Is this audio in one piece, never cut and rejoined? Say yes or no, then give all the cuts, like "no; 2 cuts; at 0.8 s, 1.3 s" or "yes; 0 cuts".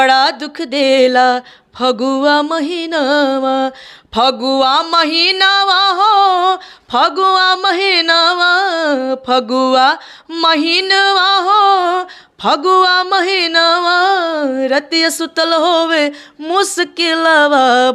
yes; 0 cuts